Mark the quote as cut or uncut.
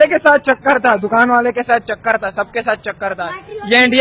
uncut